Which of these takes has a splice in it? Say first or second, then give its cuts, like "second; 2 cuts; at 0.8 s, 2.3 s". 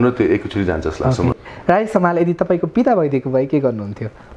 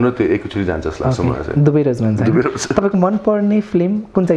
first; 1 cut; at 1.4 s